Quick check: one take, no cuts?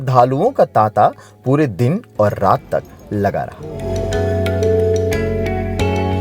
yes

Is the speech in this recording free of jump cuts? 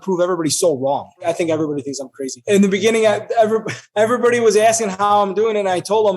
no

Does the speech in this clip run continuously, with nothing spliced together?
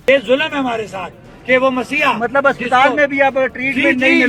yes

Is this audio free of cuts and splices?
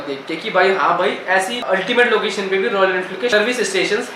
yes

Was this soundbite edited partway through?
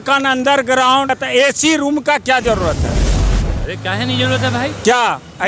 yes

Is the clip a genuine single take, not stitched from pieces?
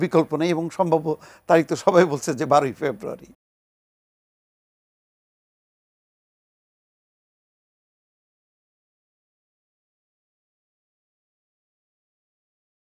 yes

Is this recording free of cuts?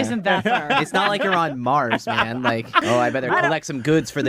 no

